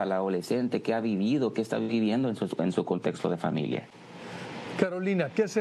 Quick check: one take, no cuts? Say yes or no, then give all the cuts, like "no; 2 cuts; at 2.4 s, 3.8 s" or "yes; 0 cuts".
yes; 0 cuts